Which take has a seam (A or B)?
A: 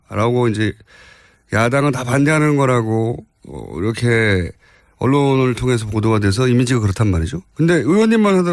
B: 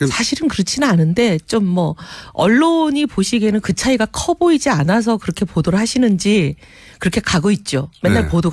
B